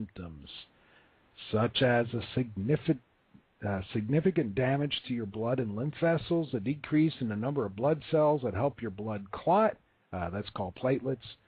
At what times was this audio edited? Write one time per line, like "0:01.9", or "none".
none